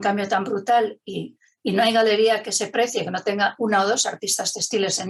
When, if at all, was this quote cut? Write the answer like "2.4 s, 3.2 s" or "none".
none